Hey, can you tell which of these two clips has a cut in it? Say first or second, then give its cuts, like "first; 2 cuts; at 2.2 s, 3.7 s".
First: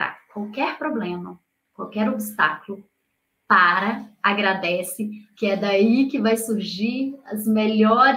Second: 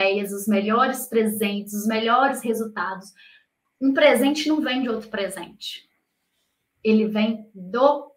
second; 1 cut; at 3.6 s